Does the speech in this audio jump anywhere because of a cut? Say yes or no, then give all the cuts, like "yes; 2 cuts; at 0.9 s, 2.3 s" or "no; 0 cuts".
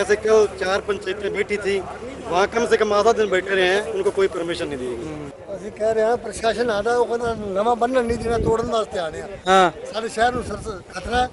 yes; 1 cut; at 5.3 s